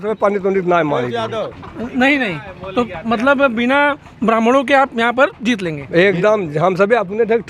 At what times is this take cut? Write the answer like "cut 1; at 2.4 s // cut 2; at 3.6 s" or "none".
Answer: none